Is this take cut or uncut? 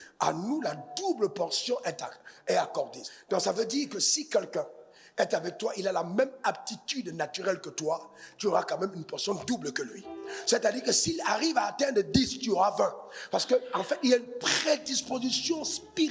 cut